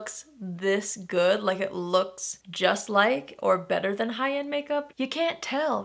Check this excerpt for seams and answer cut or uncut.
cut